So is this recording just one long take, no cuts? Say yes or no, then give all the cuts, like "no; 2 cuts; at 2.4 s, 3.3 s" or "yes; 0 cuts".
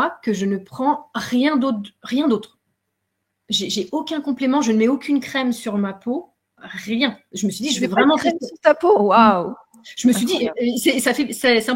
yes; 0 cuts